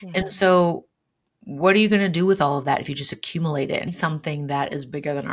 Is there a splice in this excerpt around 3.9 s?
yes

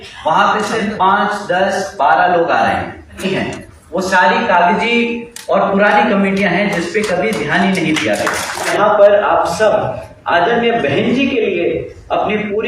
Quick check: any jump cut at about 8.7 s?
yes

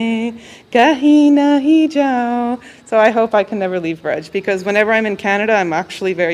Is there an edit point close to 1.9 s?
no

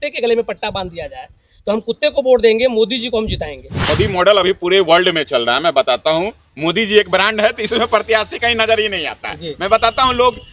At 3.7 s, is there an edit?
yes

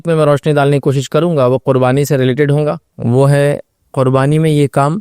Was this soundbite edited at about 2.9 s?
yes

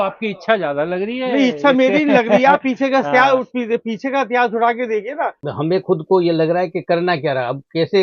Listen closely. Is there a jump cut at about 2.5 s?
no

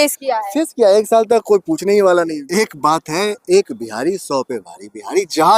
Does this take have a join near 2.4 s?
yes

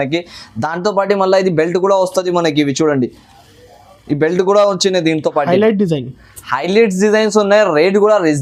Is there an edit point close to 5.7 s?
no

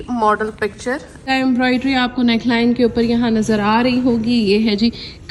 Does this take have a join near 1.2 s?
yes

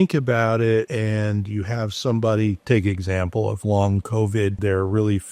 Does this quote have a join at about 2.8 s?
no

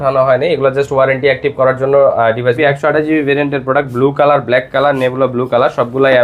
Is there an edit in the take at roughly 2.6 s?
yes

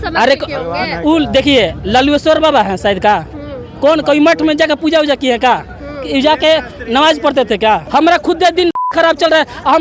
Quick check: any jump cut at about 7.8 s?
yes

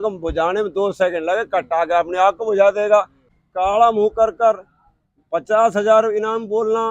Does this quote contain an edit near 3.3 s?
yes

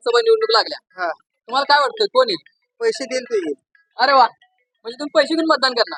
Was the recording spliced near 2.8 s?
no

